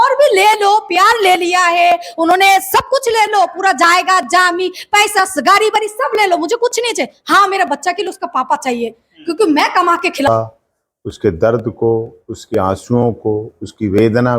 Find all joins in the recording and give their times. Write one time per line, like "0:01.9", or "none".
0:10.3